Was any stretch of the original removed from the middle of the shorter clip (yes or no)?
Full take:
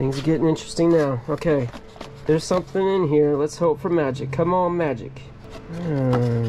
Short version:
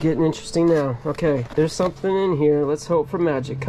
yes